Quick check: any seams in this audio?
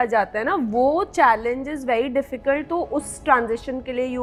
no; 0 cuts

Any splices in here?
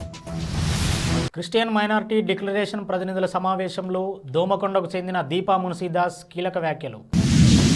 no; 0 cuts

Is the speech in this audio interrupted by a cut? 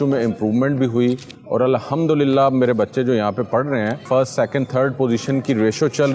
no; 0 cuts

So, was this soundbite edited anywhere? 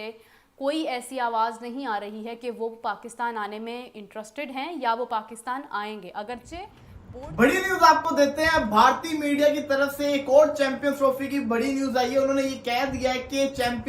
yes; 1 cut; at 7.0 s

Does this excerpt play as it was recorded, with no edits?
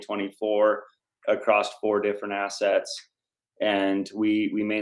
yes; 0 cuts

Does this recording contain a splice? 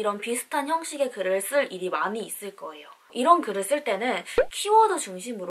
no; 0 cuts

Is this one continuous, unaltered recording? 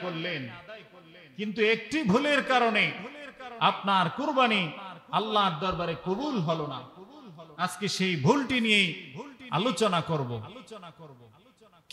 yes; 0 cuts

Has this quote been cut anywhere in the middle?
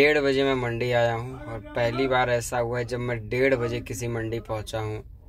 no; 0 cuts

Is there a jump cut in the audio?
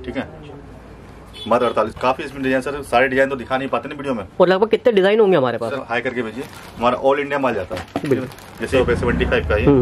yes; 3 cuts; at 1.9 s, 5.8 s, 8.7 s

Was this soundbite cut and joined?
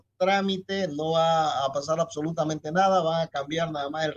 no; 0 cuts

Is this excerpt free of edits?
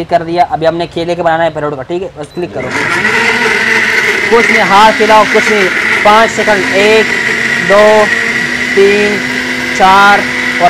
yes; 0 cuts

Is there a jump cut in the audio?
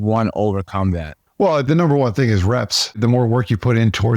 yes; 2 cuts; at 1.7 s, 3.0 s

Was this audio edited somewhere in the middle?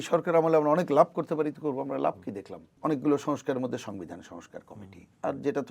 yes; 1 cut; at 2.6 s

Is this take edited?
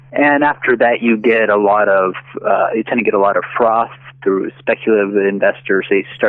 no; 0 cuts

